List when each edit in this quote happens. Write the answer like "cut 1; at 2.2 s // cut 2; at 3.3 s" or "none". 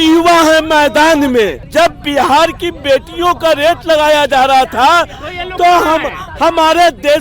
cut 1; at 1.6 s